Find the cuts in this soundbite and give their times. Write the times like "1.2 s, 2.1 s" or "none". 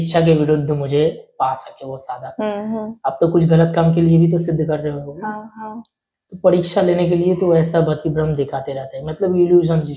none